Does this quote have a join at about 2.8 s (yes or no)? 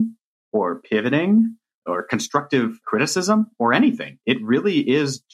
yes